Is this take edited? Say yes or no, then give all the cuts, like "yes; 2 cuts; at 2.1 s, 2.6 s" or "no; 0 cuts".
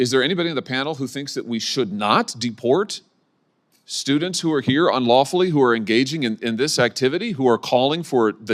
no; 0 cuts